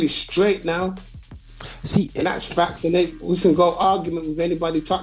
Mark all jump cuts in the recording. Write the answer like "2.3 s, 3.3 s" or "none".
none